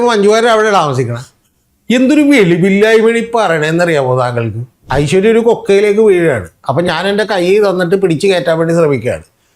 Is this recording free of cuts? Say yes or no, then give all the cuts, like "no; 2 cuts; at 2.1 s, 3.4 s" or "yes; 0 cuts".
no; 1 cut; at 4.8 s